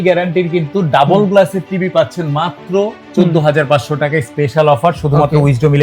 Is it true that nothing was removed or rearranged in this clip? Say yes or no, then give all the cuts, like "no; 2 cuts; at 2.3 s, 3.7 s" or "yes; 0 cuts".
yes; 0 cuts